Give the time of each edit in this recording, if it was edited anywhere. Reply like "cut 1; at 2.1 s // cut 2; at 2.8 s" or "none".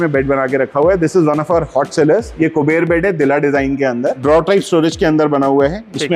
cut 1; at 2.3 s // cut 2; at 4.2 s